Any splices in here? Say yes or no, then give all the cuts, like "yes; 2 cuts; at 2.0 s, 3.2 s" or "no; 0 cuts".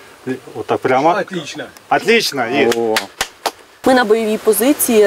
yes; 1 cut; at 3.7 s